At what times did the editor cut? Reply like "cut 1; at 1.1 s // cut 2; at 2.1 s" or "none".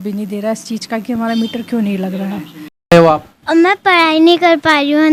cut 1; at 2.9 s